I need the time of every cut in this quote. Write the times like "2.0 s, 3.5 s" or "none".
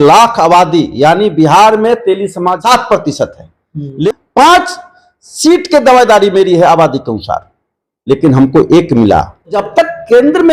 2.6 s, 4.1 s, 9.6 s